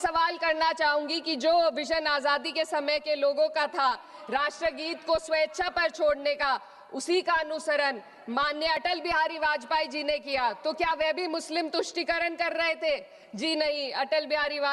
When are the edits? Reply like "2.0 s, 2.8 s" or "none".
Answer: none